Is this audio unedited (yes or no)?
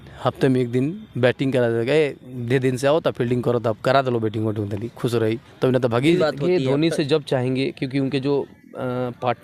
no